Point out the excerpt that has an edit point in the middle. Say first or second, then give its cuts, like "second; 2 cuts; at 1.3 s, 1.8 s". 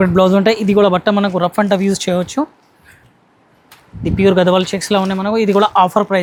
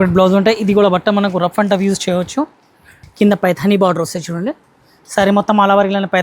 second; 1 cut; at 3.0 s